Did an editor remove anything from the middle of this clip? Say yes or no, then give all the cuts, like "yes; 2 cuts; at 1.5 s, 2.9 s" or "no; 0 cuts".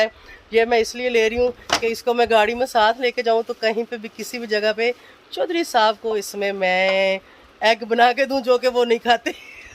no; 0 cuts